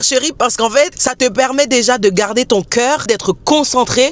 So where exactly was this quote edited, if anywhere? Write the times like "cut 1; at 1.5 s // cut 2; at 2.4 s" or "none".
none